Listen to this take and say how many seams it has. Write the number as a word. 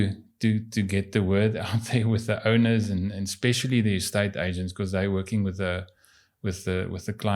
zero